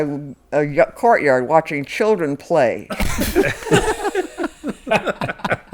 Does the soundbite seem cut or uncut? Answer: uncut